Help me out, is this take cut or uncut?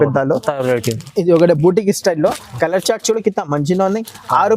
uncut